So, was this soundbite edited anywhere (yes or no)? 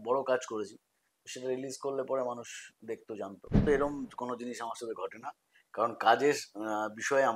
yes